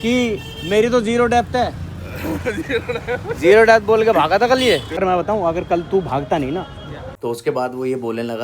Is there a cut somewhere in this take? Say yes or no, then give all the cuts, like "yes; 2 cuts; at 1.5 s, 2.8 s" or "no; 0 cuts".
yes; 2 cuts; at 4.9 s, 7.0 s